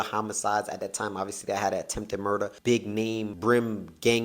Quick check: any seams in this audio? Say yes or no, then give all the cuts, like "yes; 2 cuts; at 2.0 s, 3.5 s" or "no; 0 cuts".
yes; 2 cuts; at 2.6 s, 3.3 s